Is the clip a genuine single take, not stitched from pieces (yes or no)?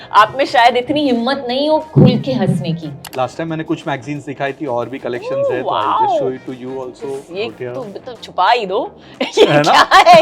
no